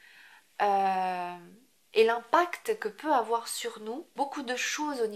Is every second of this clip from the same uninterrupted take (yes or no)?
no